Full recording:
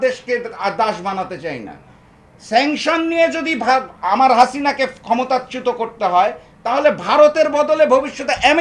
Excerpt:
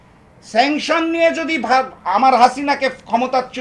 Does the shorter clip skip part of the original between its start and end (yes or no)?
no